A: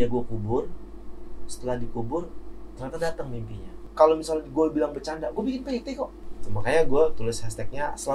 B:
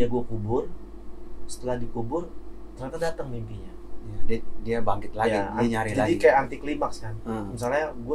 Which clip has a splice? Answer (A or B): A